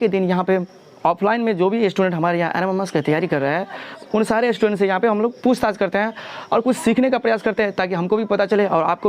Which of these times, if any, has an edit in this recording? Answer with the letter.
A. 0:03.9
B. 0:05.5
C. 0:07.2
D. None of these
A